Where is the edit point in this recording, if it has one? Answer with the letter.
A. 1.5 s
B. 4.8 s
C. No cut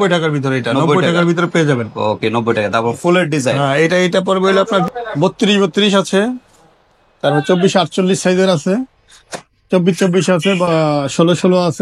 B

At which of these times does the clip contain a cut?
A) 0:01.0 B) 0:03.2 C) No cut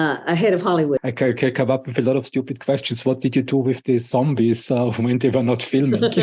A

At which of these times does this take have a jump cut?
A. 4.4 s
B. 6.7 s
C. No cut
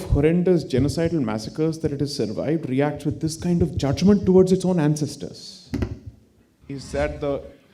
B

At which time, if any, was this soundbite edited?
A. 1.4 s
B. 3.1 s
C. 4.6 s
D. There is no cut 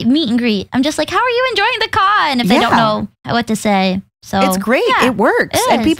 B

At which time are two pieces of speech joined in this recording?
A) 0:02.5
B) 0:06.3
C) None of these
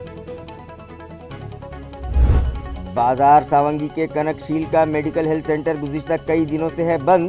A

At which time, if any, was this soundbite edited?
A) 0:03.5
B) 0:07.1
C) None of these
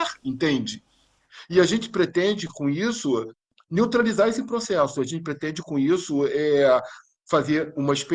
A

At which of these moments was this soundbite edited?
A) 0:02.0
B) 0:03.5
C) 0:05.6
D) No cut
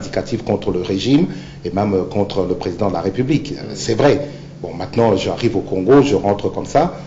D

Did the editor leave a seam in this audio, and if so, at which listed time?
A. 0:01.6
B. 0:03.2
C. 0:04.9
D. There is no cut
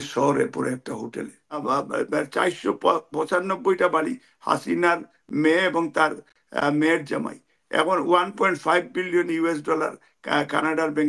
A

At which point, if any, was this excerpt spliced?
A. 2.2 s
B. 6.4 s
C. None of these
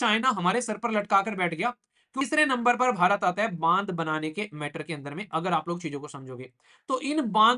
A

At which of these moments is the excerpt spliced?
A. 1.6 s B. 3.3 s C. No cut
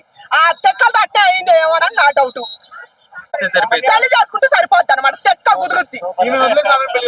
B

